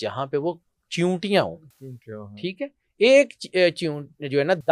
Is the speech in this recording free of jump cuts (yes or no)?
yes